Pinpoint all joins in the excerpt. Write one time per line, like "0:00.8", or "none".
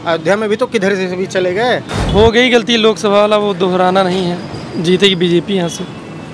0:02.0

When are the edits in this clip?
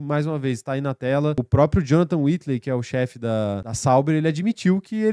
0:01.4
0:03.7

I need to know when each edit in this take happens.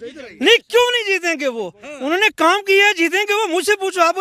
none

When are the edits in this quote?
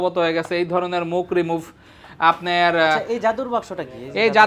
none

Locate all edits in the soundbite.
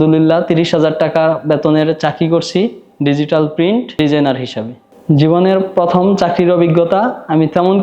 0:04.8

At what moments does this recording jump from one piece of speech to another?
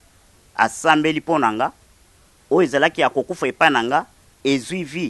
none

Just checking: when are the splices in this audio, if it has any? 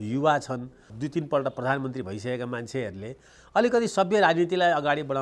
0:00.9

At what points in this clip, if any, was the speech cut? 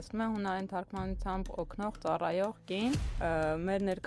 0:03.1

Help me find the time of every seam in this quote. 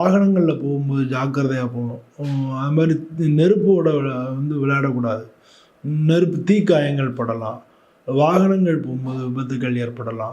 none

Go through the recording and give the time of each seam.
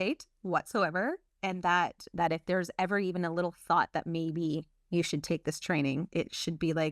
0:02.0

